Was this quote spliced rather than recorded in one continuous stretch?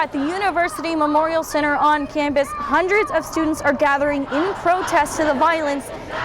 no; 0 cuts

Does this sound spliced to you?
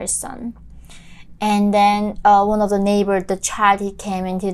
no; 0 cuts

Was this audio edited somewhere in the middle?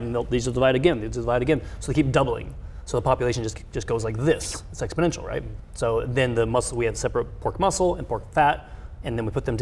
yes; 1 cut; at 5.6 s

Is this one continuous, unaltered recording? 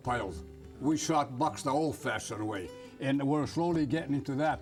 yes; 0 cuts

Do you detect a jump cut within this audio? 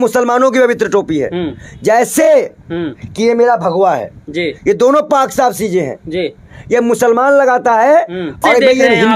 no; 0 cuts

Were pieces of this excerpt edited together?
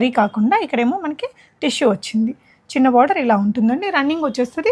no; 0 cuts

